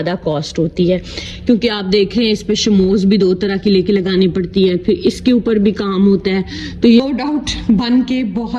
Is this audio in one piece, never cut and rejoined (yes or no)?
no